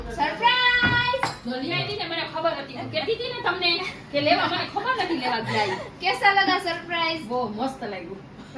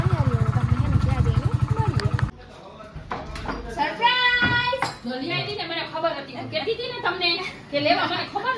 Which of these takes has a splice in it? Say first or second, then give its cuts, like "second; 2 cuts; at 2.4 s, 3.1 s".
second; 1 cut; at 2.3 s